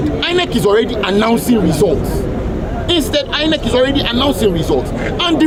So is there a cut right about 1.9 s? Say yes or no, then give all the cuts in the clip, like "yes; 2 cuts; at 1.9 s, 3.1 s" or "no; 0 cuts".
no; 0 cuts